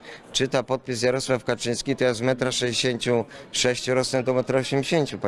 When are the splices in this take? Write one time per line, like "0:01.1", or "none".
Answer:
none

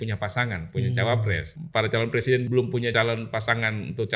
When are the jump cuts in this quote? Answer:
0:01.5
0:02.6

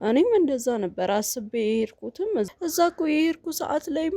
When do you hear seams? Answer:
0:02.5

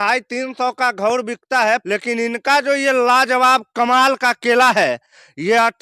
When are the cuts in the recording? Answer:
0:01.8

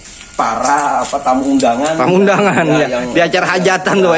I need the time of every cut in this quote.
none

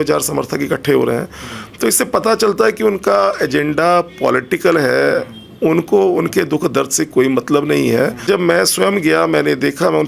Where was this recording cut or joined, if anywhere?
0:08.2

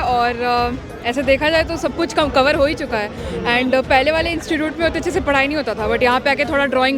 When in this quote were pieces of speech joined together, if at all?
none

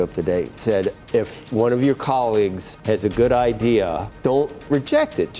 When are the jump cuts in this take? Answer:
0:01.0
0:02.7
0:04.1

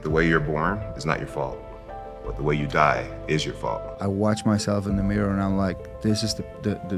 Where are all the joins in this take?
0:03.9

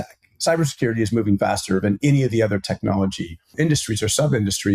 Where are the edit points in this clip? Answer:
0:03.5

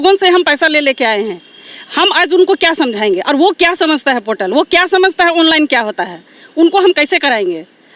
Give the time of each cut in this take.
none

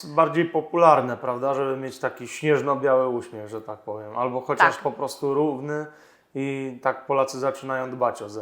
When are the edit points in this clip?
none

